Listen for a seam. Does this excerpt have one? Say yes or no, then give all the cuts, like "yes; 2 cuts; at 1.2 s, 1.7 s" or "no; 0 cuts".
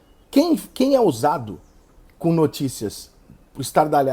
no; 0 cuts